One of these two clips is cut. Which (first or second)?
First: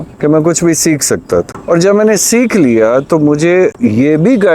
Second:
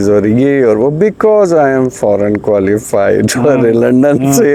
first